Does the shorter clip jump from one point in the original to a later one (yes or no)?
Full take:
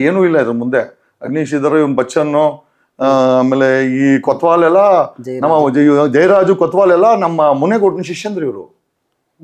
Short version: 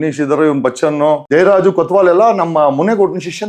yes